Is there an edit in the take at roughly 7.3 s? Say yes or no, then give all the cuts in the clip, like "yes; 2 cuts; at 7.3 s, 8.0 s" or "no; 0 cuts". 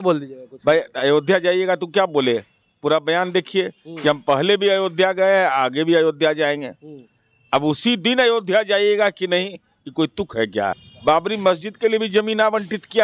no; 1 cut; at 10.9 s